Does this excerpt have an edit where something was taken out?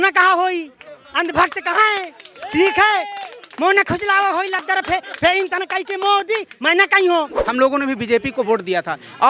yes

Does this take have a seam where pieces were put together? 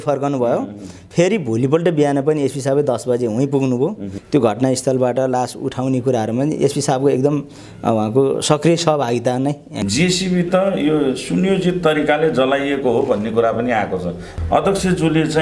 yes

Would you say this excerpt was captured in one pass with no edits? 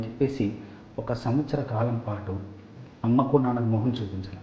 no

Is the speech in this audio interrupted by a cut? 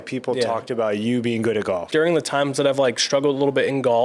yes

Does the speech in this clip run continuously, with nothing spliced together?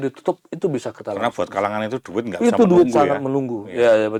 yes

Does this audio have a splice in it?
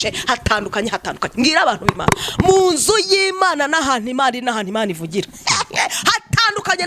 no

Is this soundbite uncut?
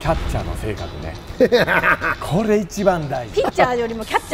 yes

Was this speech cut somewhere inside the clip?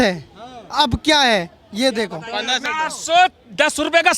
yes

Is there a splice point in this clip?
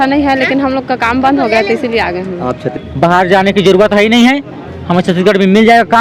yes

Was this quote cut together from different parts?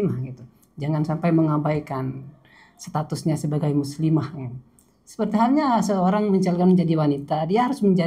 no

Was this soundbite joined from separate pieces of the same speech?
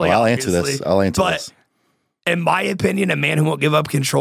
no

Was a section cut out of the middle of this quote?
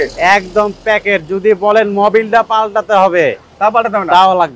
no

